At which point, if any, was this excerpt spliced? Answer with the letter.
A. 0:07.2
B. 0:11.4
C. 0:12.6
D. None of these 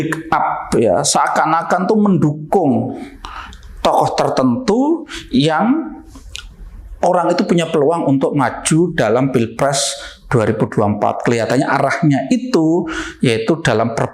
D